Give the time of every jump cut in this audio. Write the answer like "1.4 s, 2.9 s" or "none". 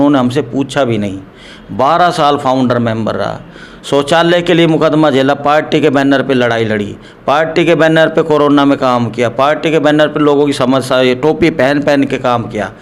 none